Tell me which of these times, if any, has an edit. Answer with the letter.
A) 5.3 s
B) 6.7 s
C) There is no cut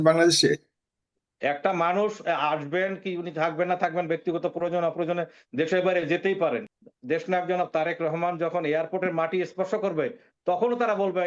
B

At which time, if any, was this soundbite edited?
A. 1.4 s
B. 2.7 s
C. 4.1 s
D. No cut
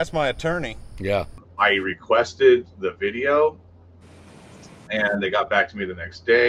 A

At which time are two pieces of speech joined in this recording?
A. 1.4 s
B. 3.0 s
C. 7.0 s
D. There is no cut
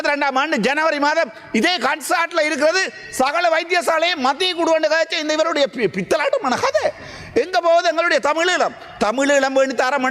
D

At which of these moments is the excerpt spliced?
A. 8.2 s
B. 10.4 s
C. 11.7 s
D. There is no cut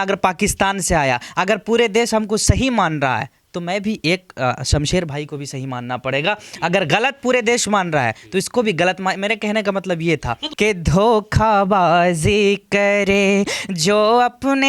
B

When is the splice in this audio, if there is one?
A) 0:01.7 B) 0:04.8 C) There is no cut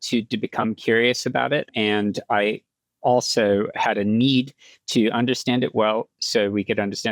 A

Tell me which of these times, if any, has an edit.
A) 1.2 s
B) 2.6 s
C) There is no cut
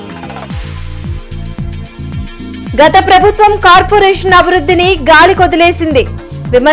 B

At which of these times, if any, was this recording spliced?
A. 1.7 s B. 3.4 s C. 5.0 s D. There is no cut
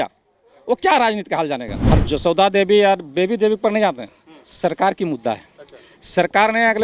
A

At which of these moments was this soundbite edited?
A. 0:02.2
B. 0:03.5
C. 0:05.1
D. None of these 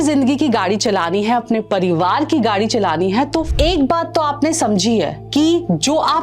B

